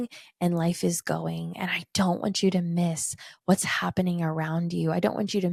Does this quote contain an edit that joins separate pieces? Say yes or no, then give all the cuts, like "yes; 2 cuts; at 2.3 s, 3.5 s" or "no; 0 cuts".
no; 0 cuts